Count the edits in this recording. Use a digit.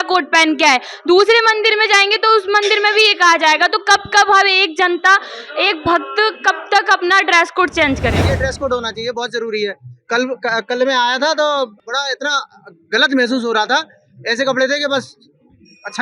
2